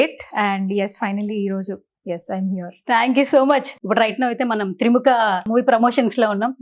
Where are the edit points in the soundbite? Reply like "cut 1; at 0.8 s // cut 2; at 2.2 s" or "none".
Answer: cut 1; at 3.7 s // cut 2; at 5.5 s

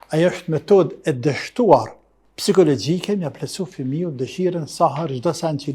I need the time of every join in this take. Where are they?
none

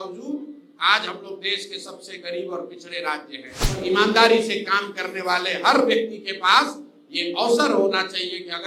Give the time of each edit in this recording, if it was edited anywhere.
cut 1; at 3.9 s

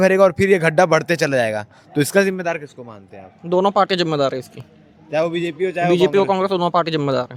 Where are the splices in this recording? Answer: none

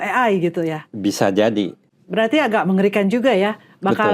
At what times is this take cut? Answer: cut 1; at 1.8 s

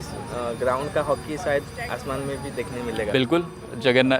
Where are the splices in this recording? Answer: cut 1; at 3.1 s

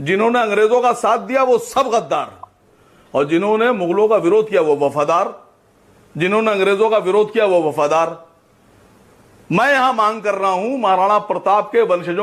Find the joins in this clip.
cut 1; at 7.8 s

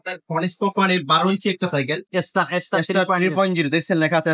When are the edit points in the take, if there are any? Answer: cut 1; at 2.1 s

